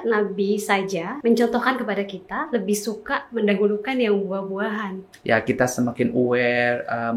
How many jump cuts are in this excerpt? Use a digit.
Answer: 2